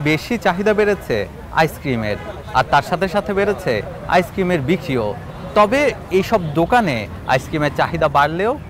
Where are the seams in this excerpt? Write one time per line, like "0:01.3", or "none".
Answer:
none